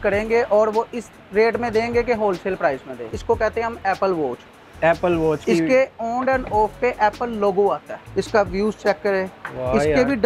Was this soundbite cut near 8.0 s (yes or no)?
yes